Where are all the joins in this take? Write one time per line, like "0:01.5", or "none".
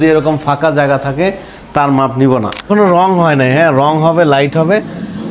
0:02.6